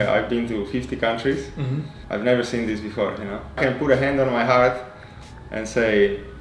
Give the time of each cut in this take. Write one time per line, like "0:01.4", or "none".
0:02.0
0:03.4